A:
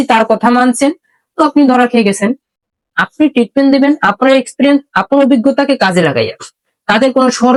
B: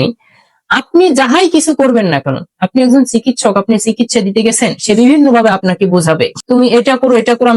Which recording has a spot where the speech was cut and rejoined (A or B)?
B